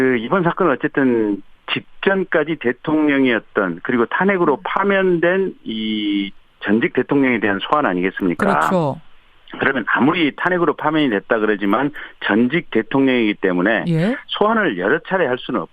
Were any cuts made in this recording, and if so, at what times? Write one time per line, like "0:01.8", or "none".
0:05.6